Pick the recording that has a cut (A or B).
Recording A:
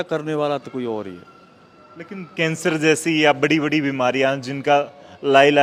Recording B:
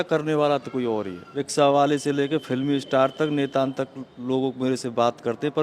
B